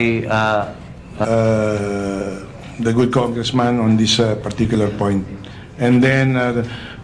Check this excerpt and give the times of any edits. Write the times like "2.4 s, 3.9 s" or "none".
none

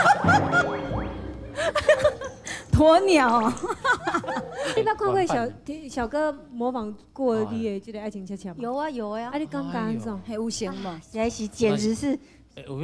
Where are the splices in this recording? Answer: 4.8 s

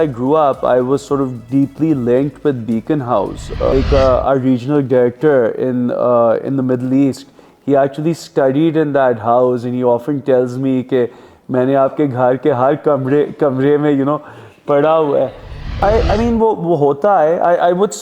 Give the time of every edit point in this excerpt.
3.7 s, 15.6 s

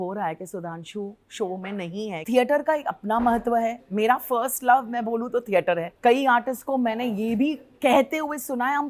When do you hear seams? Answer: 2.2 s, 5.9 s

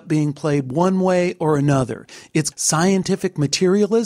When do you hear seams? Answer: 2.5 s

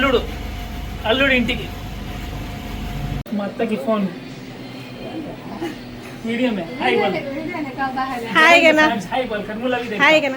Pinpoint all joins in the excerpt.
3.2 s

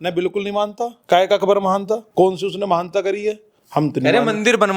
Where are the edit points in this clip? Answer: 1.0 s, 2.1 s

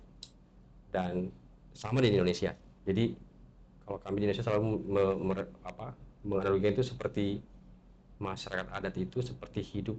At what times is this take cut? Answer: none

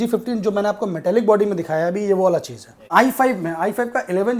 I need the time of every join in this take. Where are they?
2.9 s

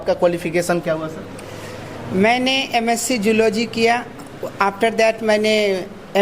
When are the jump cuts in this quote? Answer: none

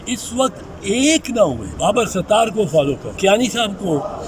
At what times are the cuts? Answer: 1.7 s, 3.1 s

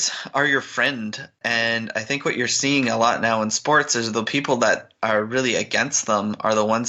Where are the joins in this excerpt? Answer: 1.3 s

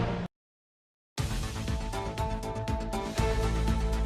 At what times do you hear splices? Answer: 1.0 s

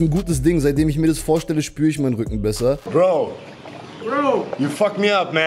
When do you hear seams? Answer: 2.8 s

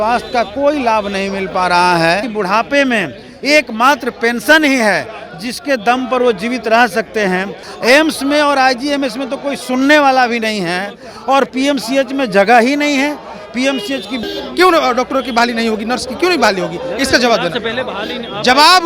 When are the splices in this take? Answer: 2.3 s, 7.6 s, 14.2 s

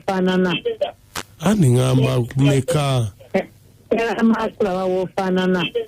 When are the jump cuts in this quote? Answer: 1.0 s

